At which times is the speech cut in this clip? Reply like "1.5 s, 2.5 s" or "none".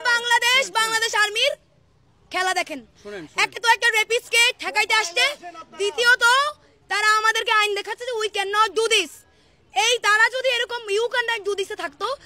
none